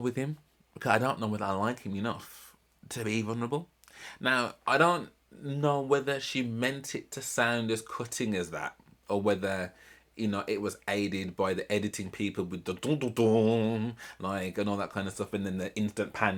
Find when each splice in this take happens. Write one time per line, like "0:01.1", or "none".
none